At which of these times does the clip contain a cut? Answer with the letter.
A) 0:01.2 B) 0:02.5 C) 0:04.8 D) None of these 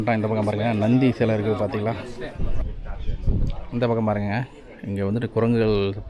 B